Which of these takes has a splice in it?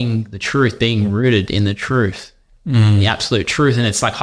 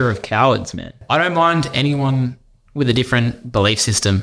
second; 1 cut; at 1.0 s

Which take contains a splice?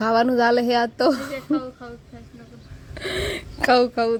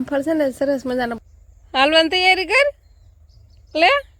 second; 1 cut; at 1.2 s

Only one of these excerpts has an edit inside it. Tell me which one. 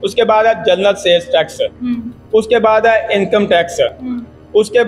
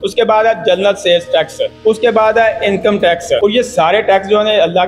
second; 2 cuts; at 1.7 s, 3.4 s

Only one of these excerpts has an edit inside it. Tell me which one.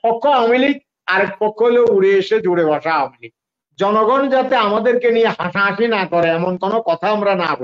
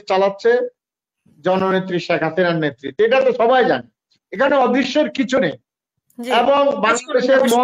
first; 1 cut; at 3.6 s

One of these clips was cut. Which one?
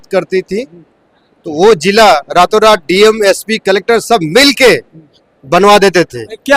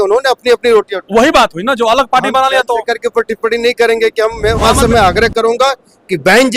second; 1 cut; at 4.7 s

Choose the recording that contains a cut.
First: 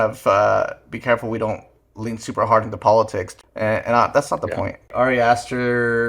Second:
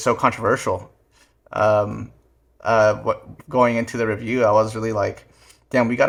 first; 2 cuts; at 3.3 s, 4.9 s

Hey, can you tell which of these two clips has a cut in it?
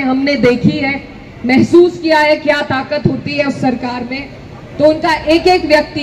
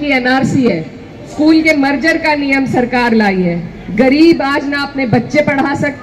second; 1 cut; at 1.3 s

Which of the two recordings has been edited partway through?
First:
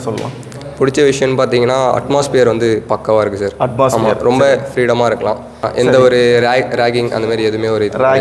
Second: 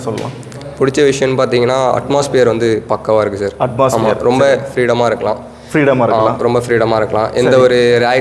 first; 1 cut; at 5.6 s

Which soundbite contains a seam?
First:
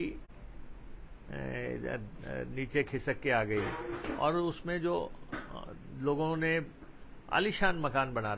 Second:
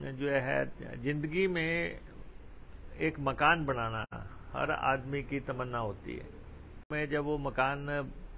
second; 1 cut; at 6.9 s

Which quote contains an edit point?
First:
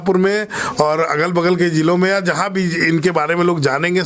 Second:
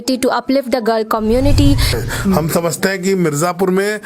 second; 1 cut; at 1.9 s

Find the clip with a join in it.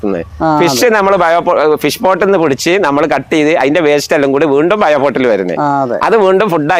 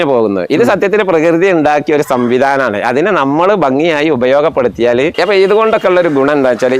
second; 1 cut; at 5.1 s

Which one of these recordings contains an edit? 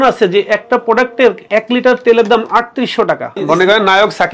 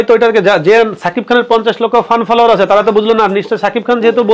first; 2 cuts; at 1.4 s, 3.3 s

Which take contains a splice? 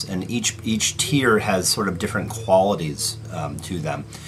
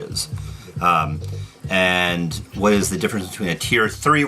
second; 1 cut; at 3.3 s

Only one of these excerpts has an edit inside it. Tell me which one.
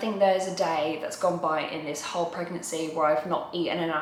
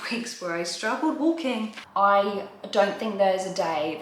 second; 1 cut; at 1.8 s

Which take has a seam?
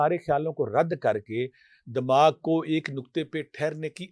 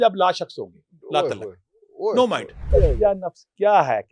second; 1 cut; at 2.6 s

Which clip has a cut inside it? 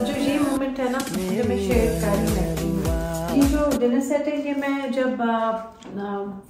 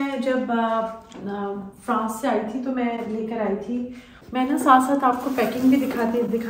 second; 1 cut; at 4.1 s

